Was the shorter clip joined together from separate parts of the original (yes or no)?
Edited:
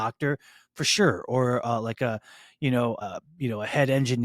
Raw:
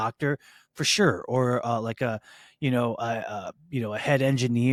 yes